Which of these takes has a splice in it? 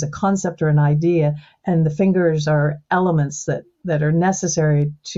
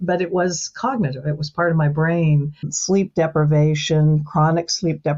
second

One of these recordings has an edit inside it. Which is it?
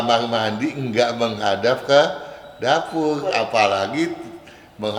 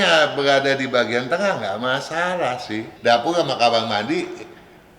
second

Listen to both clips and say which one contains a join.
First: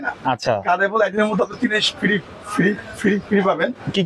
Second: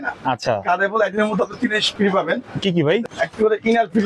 second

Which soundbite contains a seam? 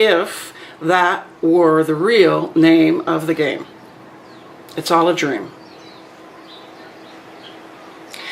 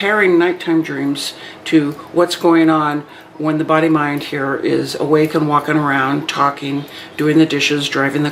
first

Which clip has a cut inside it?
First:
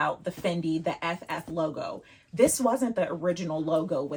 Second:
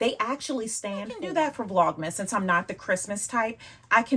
second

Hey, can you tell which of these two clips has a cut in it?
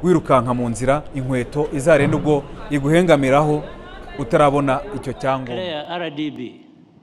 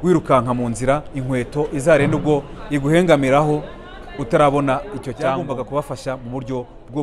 first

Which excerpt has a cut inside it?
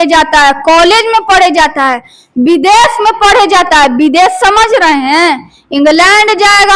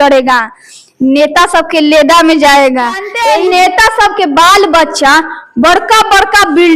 second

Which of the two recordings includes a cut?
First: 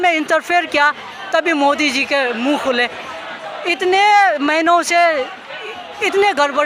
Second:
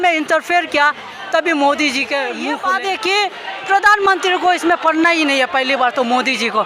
second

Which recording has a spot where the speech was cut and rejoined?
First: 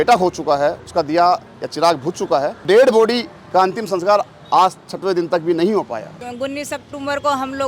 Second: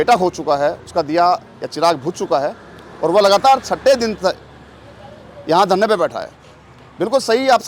first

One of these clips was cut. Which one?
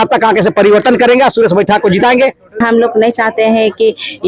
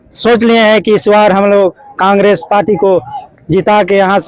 first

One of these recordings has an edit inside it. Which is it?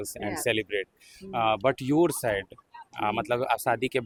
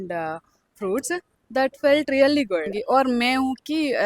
second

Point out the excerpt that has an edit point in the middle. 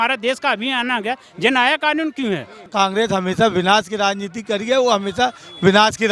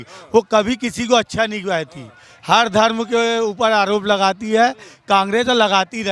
first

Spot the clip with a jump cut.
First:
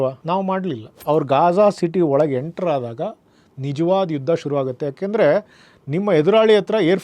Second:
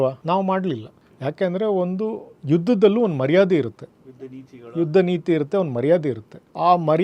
first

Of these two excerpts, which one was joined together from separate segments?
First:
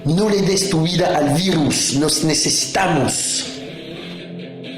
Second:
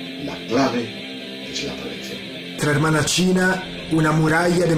first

